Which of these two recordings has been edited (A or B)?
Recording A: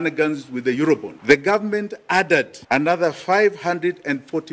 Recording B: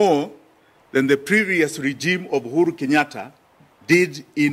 A